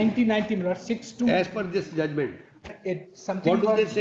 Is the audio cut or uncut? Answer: cut